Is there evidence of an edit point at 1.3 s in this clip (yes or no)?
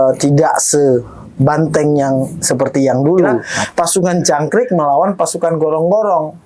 no